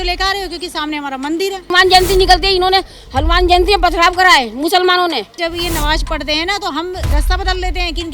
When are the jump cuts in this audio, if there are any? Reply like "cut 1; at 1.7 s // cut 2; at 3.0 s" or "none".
cut 1; at 1.7 s // cut 2; at 5.4 s